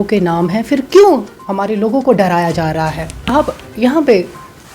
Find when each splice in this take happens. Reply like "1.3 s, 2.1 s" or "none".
3.3 s